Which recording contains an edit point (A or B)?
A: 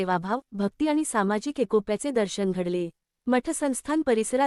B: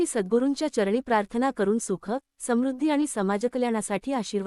B